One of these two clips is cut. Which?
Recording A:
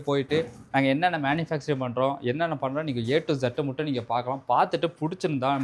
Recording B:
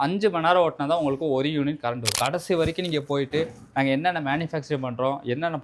B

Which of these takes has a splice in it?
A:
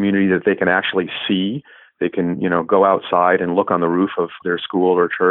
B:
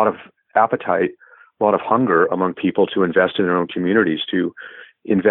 A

